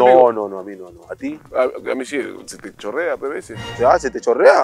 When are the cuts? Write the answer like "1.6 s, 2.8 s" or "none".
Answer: 1.5 s